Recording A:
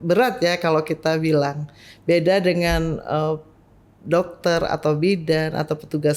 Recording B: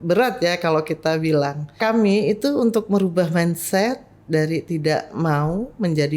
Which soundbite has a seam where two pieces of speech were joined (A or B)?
B